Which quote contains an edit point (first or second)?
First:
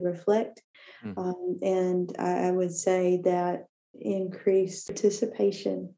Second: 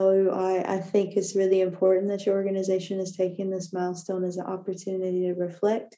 first